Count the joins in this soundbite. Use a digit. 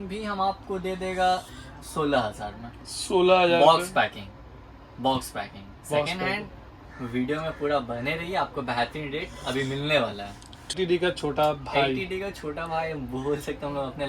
1